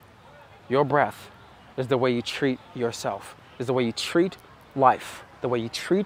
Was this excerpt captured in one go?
yes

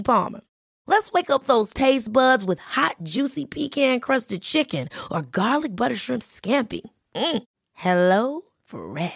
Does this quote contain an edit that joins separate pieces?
no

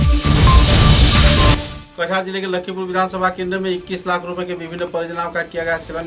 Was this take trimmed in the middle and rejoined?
yes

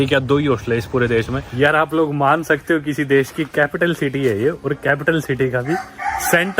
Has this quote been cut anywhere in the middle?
yes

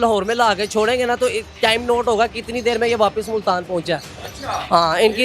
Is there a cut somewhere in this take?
no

